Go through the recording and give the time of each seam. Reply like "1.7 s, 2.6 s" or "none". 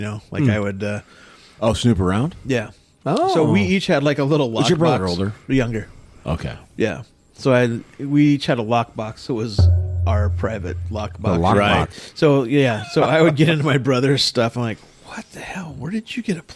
12.0 s